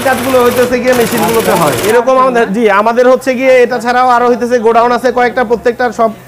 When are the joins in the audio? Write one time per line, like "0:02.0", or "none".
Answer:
0:01.8